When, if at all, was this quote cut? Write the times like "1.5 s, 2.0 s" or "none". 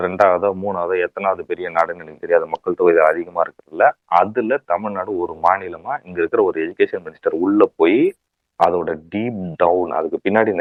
none